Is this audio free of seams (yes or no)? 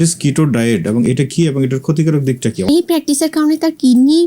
no